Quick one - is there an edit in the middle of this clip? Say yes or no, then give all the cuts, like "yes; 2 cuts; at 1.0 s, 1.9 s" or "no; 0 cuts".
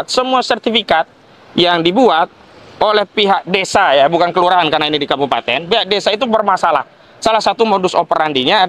no; 0 cuts